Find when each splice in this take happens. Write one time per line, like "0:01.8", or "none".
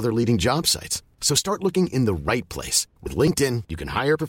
none